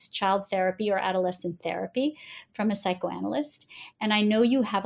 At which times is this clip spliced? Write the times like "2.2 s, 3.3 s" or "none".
none